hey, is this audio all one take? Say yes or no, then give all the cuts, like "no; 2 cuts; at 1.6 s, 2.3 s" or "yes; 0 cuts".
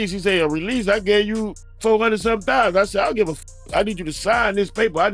yes; 0 cuts